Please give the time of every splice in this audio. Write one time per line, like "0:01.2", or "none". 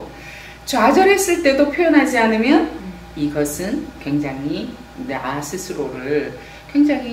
none